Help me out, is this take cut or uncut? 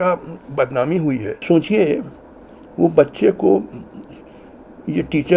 cut